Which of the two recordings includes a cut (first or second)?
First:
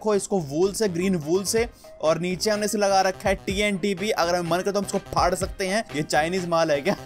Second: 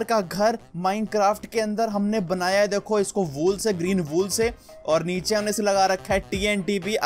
first